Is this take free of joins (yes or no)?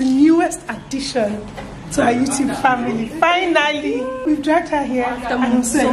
no